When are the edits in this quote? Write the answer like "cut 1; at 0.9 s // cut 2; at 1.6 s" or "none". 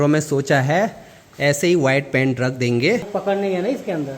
cut 1; at 3.1 s